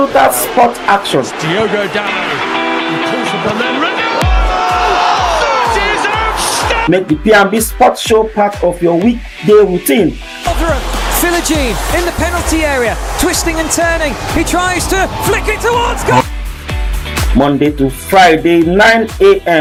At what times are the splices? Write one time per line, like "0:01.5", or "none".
none